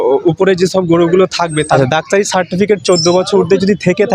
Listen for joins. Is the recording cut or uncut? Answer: cut